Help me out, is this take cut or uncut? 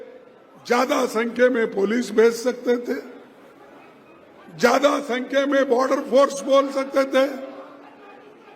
uncut